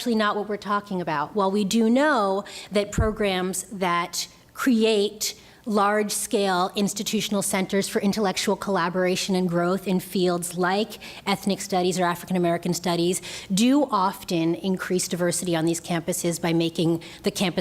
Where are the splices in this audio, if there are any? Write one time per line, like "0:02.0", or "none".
0:00.9